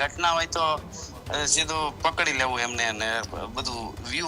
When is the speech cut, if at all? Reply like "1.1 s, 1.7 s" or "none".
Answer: none